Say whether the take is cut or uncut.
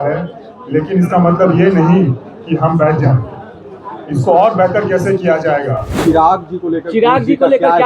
cut